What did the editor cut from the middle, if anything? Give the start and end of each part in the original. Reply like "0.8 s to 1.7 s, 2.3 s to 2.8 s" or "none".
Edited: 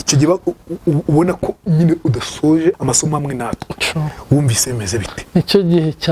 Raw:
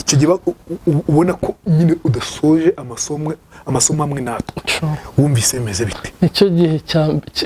2.8 s to 3.6 s